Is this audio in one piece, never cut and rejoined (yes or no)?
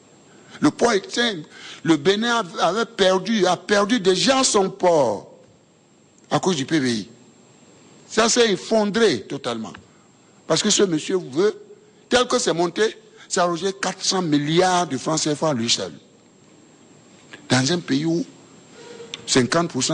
yes